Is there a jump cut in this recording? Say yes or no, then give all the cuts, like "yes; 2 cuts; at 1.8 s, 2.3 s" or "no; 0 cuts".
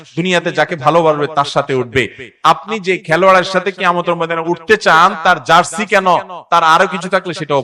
no; 0 cuts